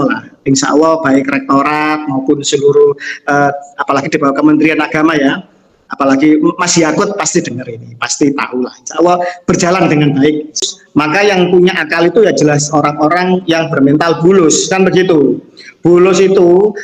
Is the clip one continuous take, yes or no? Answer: no